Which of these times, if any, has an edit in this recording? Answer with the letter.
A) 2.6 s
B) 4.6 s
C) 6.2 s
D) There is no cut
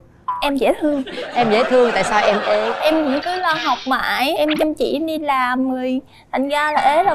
D